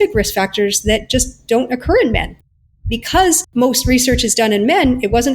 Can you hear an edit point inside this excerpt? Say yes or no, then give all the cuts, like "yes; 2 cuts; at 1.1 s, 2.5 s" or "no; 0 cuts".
yes; 1 cut; at 3.4 s